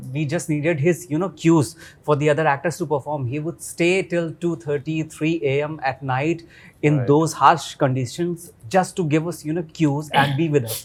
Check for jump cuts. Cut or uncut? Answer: uncut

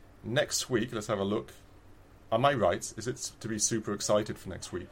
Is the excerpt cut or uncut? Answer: uncut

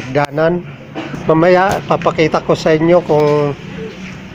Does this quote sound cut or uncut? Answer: uncut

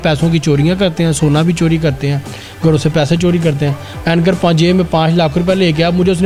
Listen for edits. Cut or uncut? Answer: uncut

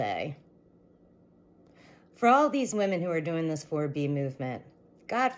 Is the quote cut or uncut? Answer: uncut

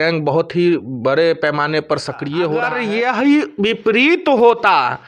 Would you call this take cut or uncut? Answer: cut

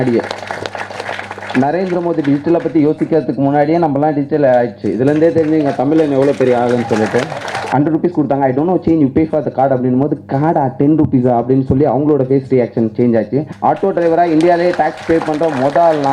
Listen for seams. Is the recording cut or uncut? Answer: cut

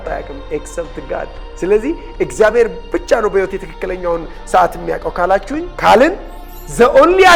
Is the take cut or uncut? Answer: uncut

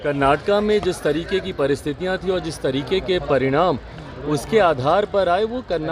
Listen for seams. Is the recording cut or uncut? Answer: uncut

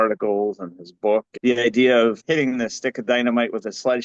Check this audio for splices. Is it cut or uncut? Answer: cut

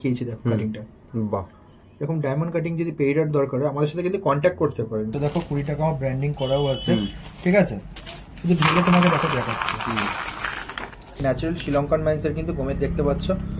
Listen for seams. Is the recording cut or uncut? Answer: cut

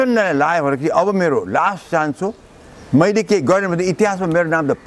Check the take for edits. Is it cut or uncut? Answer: uncut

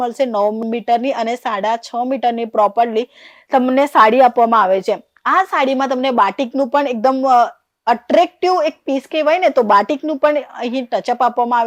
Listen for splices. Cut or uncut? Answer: uncut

